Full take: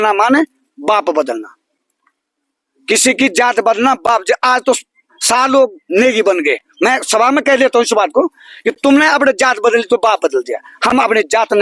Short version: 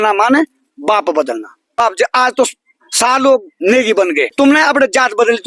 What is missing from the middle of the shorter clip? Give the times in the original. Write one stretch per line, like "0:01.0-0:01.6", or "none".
0:01.8-0:04.1
0:06.6-0:08.8